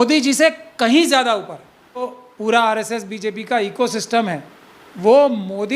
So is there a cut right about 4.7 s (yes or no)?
no